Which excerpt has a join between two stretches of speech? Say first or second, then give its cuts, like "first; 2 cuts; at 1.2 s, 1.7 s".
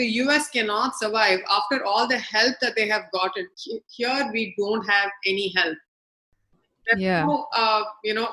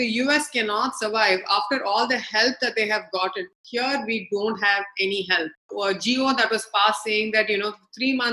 second; 2 cuts; at 3.6 s, 5.7 s